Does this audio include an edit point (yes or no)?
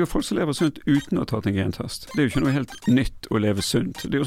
yes